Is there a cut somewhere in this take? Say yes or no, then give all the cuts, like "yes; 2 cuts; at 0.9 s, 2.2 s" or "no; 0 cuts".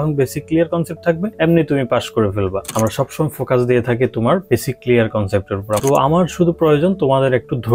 yes; 3 cuts; at 1.3 s, 2.6 s, 5.8 s